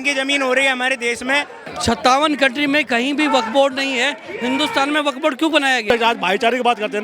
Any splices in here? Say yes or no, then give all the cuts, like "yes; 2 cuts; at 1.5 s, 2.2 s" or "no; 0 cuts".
yes; 2 cuts; at 1.6 s, 5.9 s